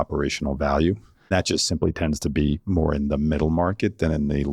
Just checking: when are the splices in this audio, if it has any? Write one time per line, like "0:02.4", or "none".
0:01.1